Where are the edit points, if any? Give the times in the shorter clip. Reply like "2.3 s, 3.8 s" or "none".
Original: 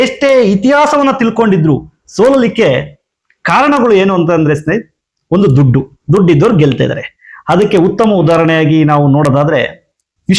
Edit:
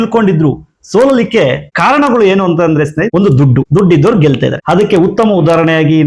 1.7 s, 3.5 s, 4.6 s